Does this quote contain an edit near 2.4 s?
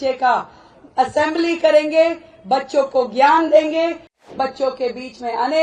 no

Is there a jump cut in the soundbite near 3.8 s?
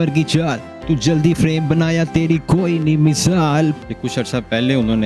yes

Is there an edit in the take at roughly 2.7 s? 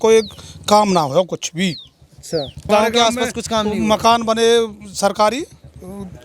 yes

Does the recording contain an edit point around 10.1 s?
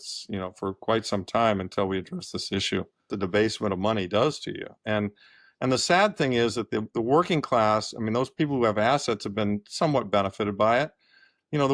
no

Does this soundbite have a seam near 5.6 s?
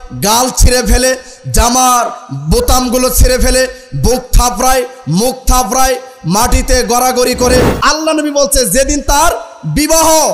no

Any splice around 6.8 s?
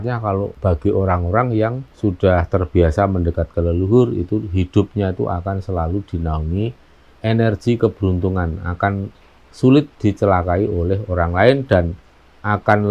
no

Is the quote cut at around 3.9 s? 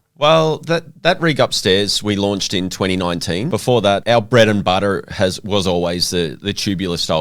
yes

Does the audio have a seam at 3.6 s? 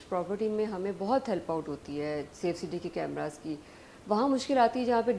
no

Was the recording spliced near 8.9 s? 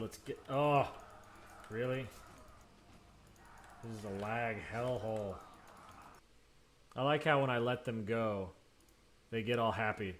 no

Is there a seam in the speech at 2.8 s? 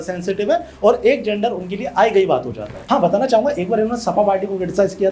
yes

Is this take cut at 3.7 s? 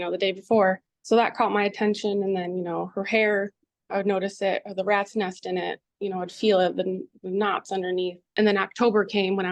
no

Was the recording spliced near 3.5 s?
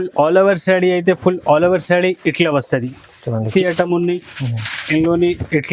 yes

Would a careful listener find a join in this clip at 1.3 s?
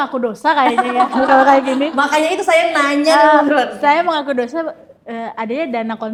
no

